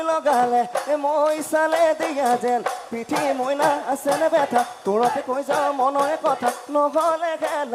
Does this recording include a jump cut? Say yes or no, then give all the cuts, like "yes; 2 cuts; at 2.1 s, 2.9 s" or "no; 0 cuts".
no; 0 cuts